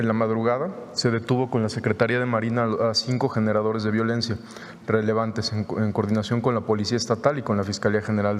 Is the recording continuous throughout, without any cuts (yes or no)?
yes